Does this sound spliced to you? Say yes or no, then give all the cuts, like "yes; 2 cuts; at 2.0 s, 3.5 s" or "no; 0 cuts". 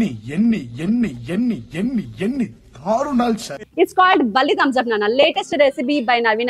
no; 0 cuts